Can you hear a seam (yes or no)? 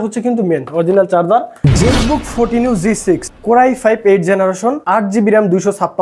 yes